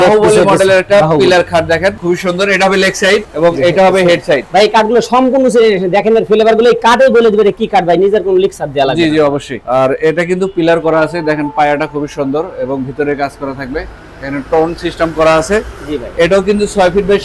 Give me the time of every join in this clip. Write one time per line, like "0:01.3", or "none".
none